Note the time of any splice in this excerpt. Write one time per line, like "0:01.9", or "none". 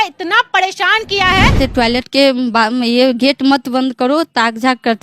0:01.6